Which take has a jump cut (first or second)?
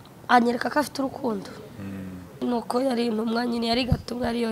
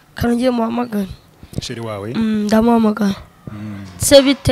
first